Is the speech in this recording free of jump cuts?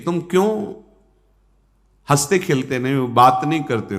yes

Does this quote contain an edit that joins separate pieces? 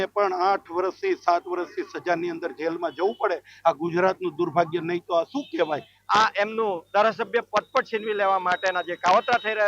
yes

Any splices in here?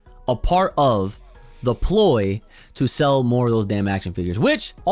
no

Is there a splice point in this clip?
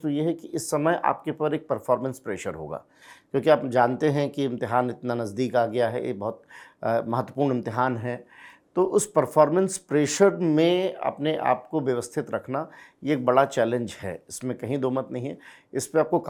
no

